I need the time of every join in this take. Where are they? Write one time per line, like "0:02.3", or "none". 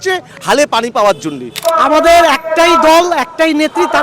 0:01.6